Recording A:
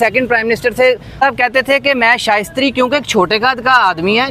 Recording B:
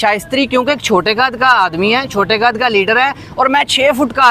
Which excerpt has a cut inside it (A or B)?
A